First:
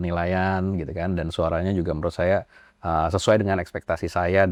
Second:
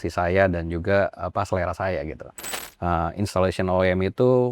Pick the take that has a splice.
second; 1 cut; at 2.5 s

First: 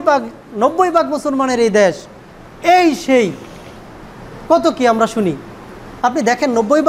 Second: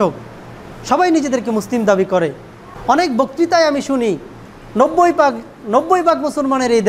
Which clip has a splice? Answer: second; 1 cut; at 2.7 s

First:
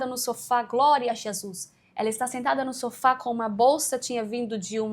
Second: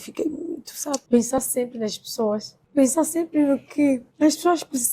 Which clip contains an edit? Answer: second; 3 cuts; at 1.0 s, 2.5 s, 4.1 s

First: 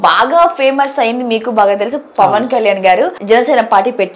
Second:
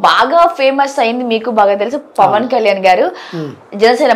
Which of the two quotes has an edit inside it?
first; 1 cut; at 3.2 s

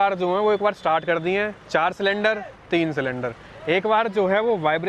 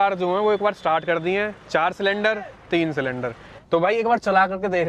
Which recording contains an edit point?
second; 1 cut; at 3.5 s

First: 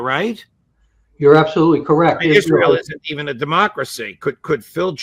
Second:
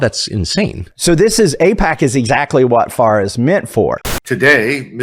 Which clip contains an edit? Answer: second; 1 cut; at 4.0 s

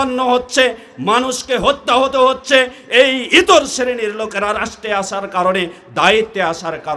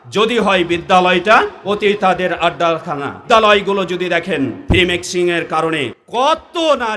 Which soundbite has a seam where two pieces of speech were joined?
second; 3 cuts; at 3.2 s, 4.6 s, 6.0 s

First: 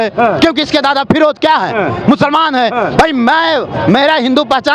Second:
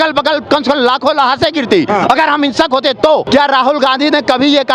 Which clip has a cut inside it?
second; 1 cut; at 3.3 s

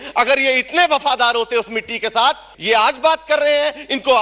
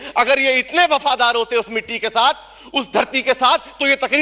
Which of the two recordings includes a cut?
first; 1 cut; at 2.5 s

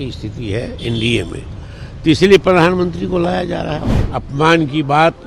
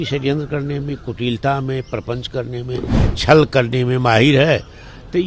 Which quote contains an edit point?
first; 1 cut; at 3.9 s

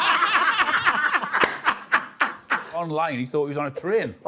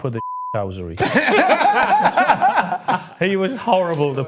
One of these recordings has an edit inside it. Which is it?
first; 1 cut; at 2.7 s

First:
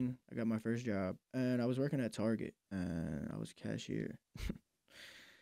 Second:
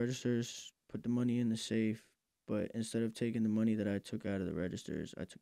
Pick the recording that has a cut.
first; 3 cuts; at 1.2 s, 2.6 s, 4.3 s

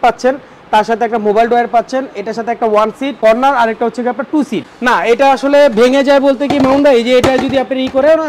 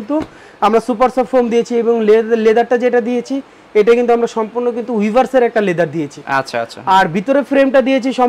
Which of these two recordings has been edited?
first; 2 cuts; at 3.1 s, 4.7 s

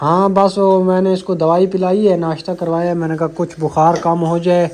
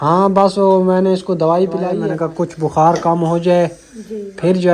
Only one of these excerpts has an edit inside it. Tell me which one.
second; 1 cut; at 1.9 s

